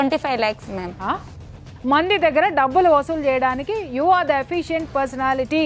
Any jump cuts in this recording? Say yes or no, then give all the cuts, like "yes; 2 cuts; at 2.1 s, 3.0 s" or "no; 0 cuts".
yes; 1 cut; at 1.3 s